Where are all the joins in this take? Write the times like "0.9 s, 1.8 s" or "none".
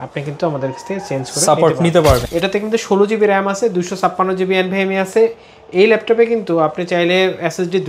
2.3 s

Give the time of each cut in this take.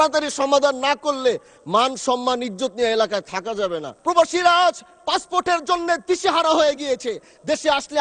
3.9 s

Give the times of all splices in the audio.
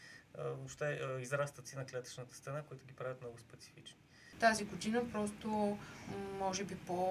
4.2 s

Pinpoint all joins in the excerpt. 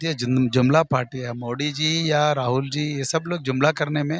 none

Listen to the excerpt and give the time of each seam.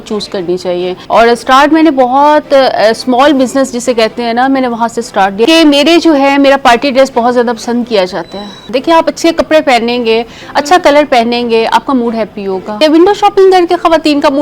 1.0 s, 5.4 s, 8.6 s, 12.8 s

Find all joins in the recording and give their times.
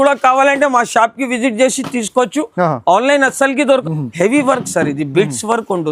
3.8 s

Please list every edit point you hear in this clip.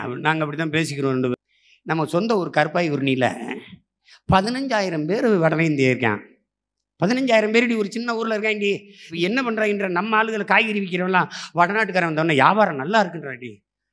1.3 s, 9.0 s

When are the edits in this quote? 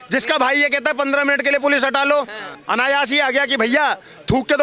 2.4 s

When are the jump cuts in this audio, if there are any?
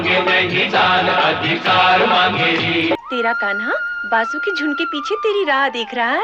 3.0 s

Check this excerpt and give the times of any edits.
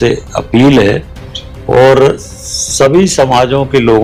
none

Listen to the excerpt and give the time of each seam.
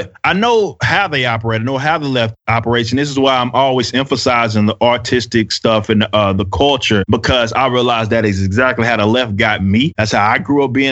7.0 s, 10.0 s

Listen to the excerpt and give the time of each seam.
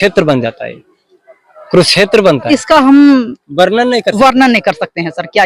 2.5 s

